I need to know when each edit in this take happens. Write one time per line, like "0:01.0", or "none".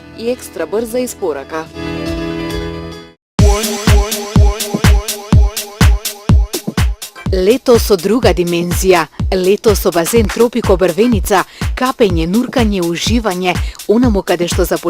0:03.1